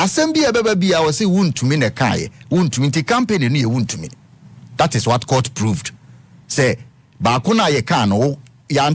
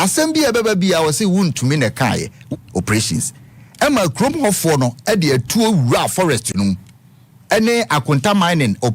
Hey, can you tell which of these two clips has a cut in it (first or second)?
second